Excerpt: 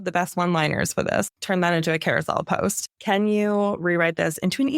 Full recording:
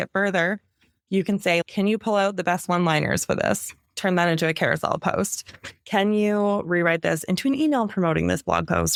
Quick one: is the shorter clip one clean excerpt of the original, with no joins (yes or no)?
no